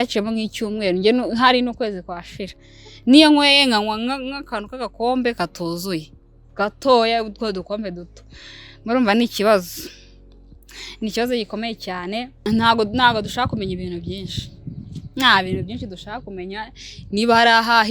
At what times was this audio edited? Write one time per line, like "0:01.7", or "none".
0:12.3